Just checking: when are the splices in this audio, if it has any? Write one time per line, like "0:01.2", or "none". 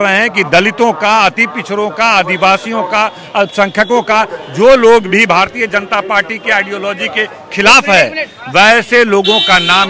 none

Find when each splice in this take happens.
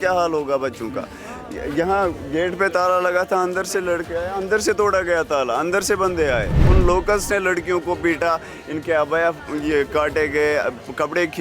0:06.6

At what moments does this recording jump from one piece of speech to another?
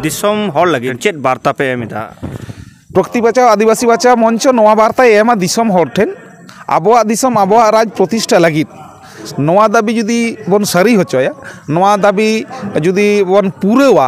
0:01.0
0:09.2

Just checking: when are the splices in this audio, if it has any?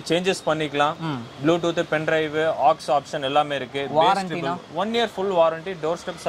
none

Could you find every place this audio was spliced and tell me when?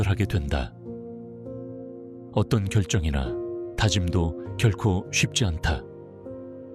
0:05.8

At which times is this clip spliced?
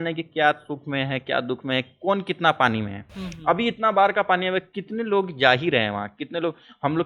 none

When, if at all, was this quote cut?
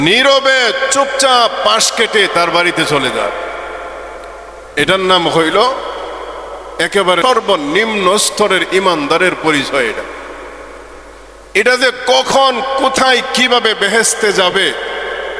0:07.2

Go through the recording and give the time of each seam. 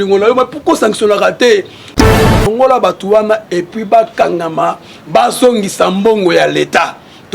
0:02.0

